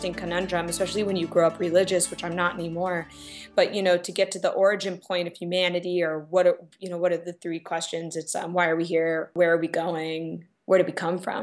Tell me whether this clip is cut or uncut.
cut